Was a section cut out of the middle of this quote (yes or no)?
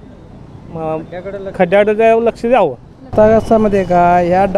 yes